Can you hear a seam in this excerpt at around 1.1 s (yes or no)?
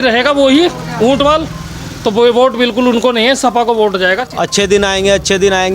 no